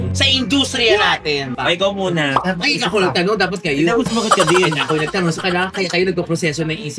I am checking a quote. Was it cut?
no; 0 cuts

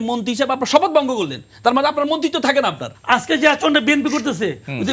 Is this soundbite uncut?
no; 1 cut; at 2.9 s

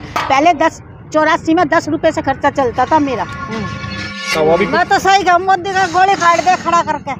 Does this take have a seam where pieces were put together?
yes; 1 cut; at 4.3 s

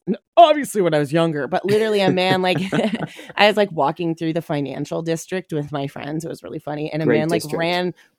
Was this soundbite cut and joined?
no; 0 cuts

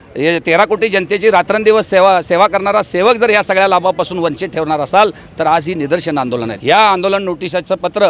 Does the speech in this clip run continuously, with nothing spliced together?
no; 1 cut; at 6.5 s

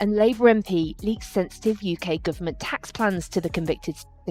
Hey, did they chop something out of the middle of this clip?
no; 0 cuts

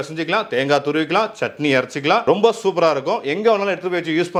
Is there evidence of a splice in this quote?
no; 0 cuts

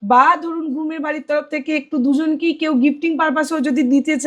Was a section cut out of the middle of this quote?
no; 0 cuts

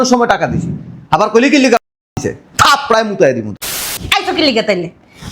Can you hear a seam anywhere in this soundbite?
yes; 1 cut; at 3.5 s

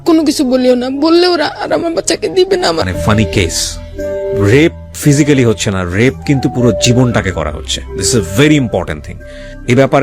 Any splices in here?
yes; 1 cut; at 2.8 s

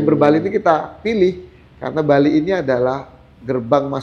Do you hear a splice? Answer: no; 0 cuts

